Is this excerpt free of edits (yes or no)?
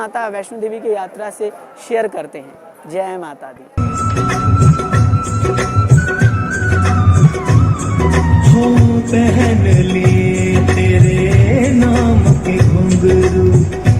yes